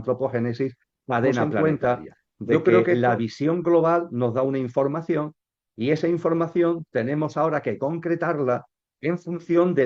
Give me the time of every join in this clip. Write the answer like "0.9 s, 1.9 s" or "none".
1.6 s